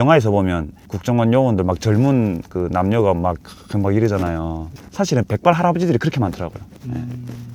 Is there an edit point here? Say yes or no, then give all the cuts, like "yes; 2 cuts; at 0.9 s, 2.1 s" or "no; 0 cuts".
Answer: yes; 1 cut; at 4.7 s